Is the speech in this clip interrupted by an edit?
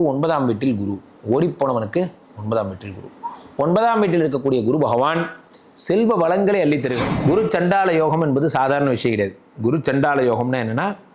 yes; 1 cut; at 7.0 s

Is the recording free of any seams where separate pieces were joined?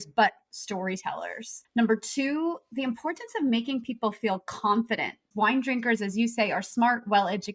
no; 1 cut; at 5.2 s

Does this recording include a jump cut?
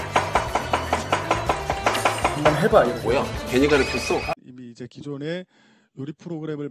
yes; 1 cut; at 4.3 s

